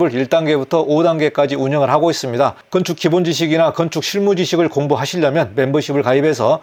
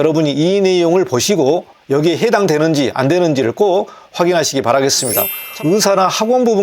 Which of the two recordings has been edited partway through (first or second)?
second